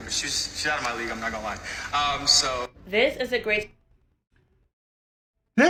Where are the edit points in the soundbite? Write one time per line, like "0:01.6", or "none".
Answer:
none